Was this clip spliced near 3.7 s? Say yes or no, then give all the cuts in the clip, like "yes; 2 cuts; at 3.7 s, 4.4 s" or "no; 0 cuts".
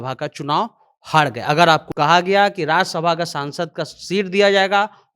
no; 1 cut; at 1.9 s